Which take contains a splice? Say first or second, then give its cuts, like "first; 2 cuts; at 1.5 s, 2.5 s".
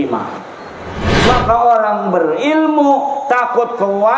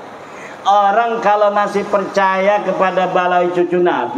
first; 1 cut; at 1.0 s